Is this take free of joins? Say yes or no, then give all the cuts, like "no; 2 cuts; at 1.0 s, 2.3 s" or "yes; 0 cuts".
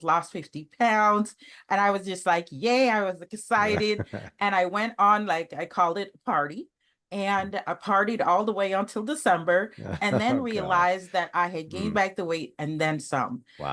yes; 0 cuts